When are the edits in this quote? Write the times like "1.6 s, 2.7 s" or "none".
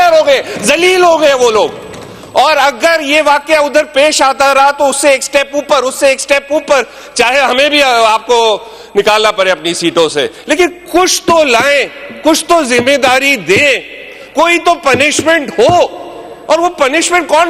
none